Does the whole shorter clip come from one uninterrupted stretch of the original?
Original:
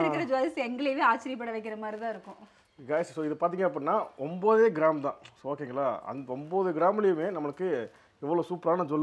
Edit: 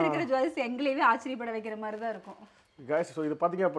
yes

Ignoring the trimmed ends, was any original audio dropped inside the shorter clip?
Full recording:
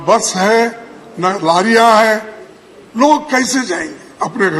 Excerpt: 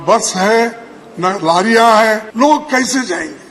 yes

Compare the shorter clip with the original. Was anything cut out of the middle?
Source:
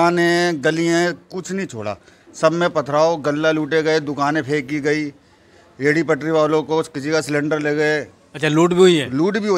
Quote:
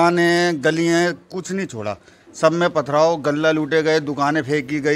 no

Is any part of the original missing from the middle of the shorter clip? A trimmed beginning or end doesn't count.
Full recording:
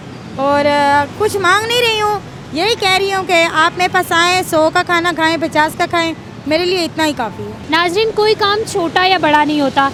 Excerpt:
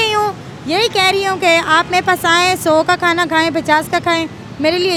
no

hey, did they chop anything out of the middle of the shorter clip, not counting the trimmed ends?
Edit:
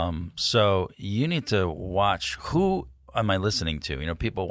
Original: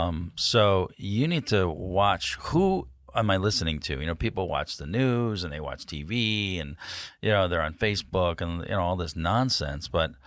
no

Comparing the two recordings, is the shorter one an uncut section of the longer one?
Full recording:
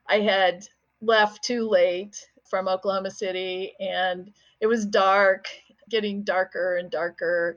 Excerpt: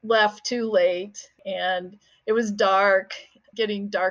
no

